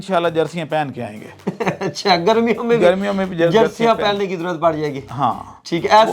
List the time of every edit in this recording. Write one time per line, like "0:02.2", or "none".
none